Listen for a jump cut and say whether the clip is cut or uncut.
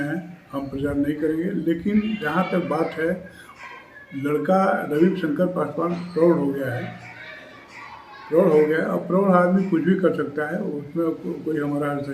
uncut